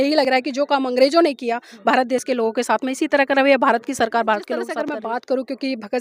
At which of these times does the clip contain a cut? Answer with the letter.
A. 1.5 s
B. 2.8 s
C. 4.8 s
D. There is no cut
C